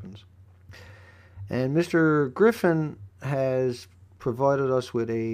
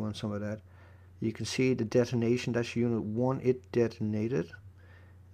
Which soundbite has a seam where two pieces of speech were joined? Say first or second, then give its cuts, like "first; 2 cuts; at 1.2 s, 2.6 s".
first; 1 cut; at 1.6 s